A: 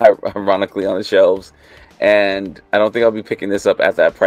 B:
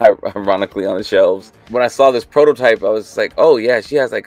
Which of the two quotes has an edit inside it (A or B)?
B